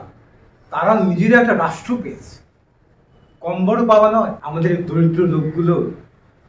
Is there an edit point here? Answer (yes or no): yes